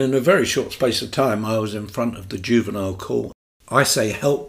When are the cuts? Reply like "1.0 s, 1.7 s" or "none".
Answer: 3.4 s